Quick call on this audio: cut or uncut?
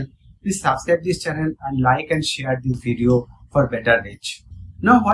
uncut